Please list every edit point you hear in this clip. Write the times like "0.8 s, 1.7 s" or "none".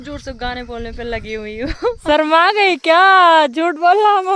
2.0 s